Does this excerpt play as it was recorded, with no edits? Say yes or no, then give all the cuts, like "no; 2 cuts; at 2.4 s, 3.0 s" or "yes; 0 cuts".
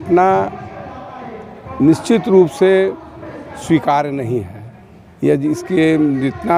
yes; 0 cuts